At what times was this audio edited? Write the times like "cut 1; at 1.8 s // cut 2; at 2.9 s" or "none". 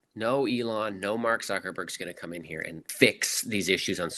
cut 1; at 2.8 s